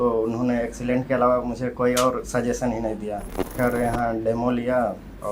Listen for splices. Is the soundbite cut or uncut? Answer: cut